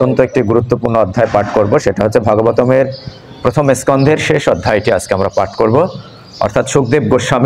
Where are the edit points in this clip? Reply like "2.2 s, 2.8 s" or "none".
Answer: none